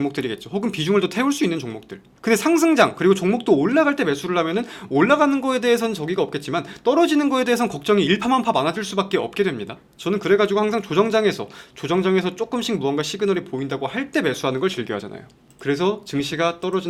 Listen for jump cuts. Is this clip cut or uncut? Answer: uncut